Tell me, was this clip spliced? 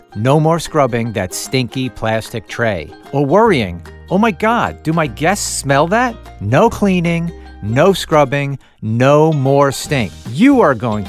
yes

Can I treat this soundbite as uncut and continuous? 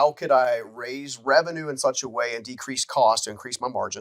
yes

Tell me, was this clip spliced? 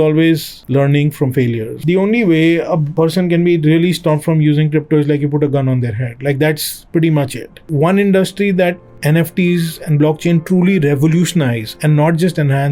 yes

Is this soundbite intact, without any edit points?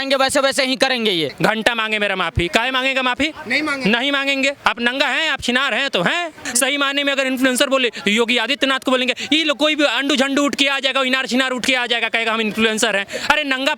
no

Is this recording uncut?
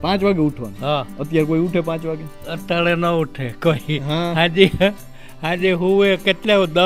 yes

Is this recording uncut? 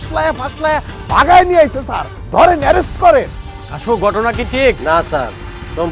no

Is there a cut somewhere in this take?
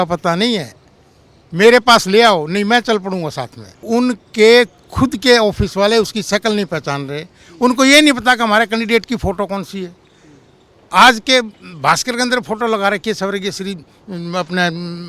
yes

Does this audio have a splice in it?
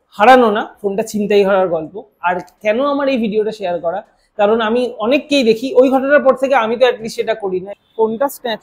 yes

